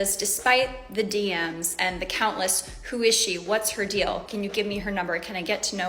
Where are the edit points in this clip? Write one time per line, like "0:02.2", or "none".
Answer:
0:04.5